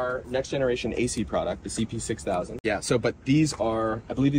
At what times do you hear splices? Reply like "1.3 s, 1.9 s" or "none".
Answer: 2.5 s